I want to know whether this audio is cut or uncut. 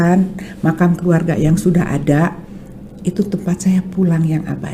uncut